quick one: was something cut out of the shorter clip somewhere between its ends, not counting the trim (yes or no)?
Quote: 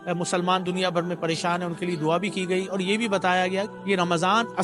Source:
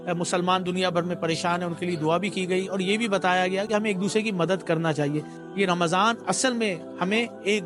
yes